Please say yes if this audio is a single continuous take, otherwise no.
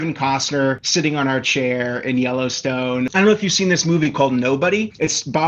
no